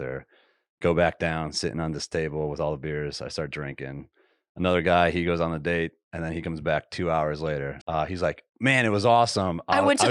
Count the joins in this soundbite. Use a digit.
1